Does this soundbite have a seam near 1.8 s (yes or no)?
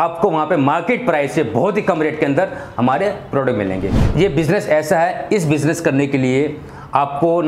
no